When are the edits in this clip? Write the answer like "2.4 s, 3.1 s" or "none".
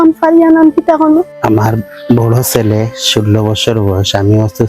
1.3 s